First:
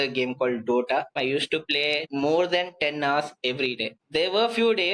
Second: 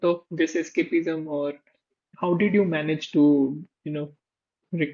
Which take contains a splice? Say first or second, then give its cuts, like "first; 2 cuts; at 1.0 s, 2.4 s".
first; 3 cuts; at 1.1 s, 2.1 s, 4.0 s